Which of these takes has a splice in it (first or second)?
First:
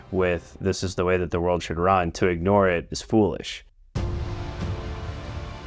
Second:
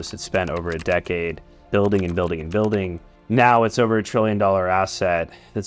second